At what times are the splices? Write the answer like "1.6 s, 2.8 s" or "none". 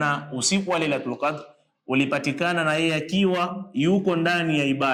none